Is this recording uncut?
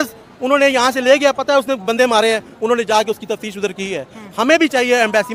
yes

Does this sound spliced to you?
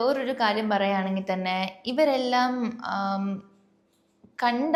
no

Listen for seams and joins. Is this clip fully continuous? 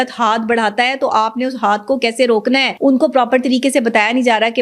no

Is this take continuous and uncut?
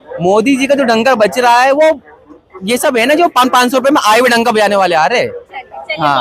yes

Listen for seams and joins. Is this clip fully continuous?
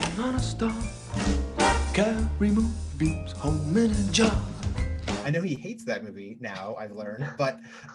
no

